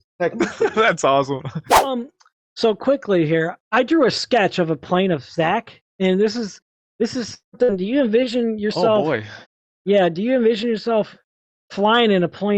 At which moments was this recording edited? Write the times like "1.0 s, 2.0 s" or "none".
1.9 s